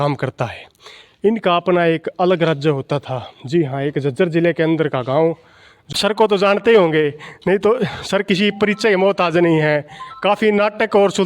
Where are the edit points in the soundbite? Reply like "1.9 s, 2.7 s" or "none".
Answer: 5.9 s